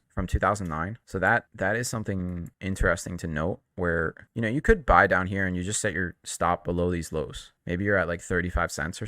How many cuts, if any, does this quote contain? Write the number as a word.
zero